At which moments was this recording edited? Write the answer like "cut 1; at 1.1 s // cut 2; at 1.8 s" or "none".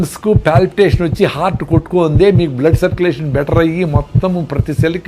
none

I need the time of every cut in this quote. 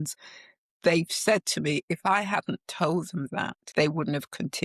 cut 1; at 3.6 s

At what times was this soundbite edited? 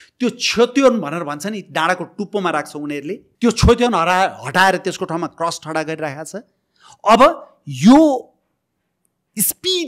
cut 1; at 3.3 s

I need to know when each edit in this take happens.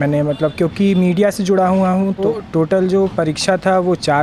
cut 1; at 2.2 s

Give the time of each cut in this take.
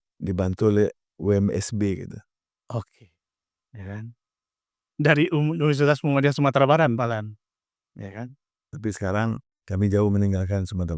cut 1; at 9.5 s

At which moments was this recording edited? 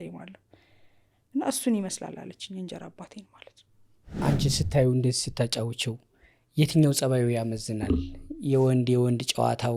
cut 1; at 4.2 s

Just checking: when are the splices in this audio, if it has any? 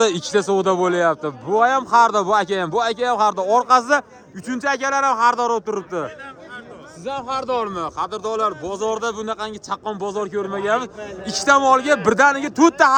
none

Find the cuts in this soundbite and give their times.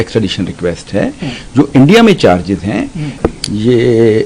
cut 1; at 3.0 s

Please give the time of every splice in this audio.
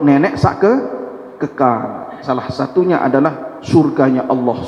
none

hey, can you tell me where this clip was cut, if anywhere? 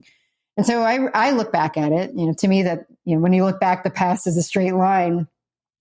none

